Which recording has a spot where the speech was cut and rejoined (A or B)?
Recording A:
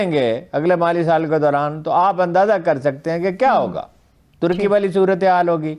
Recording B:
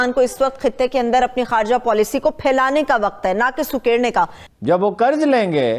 B